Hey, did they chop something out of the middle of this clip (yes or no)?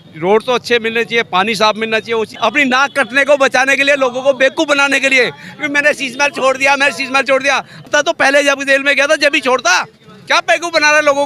yes